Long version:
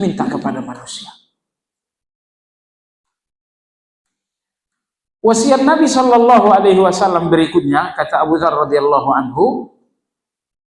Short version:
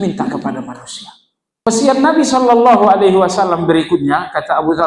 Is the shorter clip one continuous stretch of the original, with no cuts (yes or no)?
no